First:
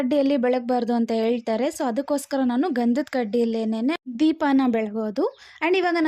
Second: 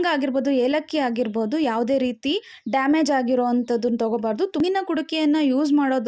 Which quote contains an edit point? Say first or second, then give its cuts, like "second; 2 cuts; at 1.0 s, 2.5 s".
second; 1 cut; at 4.6 s